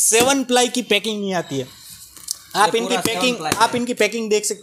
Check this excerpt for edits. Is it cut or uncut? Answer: uncut